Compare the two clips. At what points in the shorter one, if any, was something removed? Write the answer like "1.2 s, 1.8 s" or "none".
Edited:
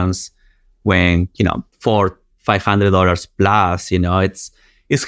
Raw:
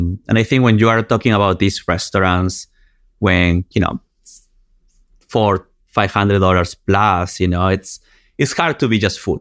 1.7 s